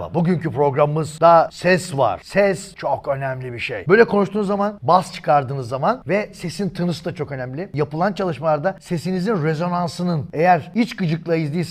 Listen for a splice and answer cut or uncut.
uncut